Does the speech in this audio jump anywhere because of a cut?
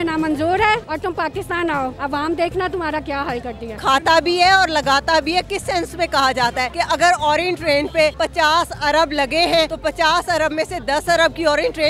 yes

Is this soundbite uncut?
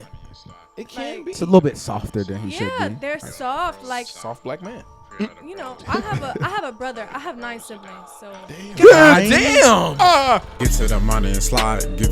no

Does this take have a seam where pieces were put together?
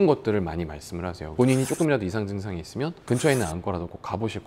yes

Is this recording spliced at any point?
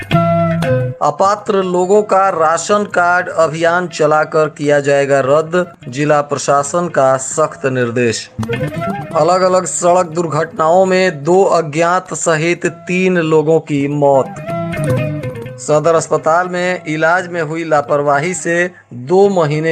yes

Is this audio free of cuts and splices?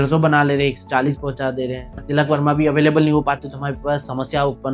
no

